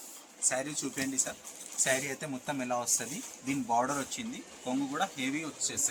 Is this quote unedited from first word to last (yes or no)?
yes